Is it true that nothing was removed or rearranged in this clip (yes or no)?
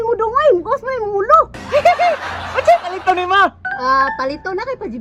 yes